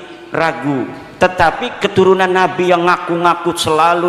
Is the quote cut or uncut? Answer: cut